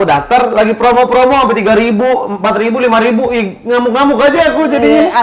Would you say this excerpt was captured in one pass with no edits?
yes; 0 cuts

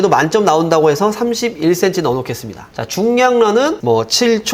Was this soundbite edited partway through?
no; 0 cuts

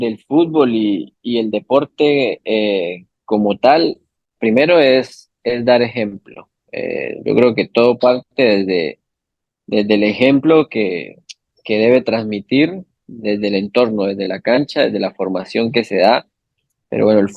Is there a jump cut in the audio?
no; 0 cuts

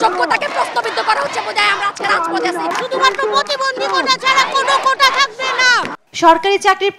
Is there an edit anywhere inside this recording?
no; 0 cuts

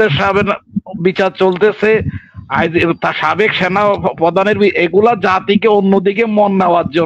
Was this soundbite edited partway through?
no; 0 cuts

